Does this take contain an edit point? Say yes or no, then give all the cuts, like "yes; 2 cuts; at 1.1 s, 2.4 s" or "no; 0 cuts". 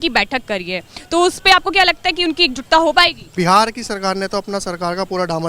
yes; 1 cut; at 3.3 s